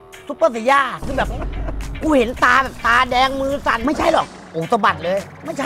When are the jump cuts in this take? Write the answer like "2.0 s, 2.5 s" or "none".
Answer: 3.8 s